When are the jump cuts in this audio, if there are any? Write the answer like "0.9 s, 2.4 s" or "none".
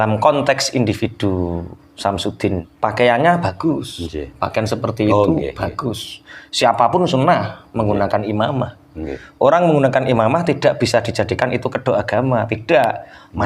2.7 s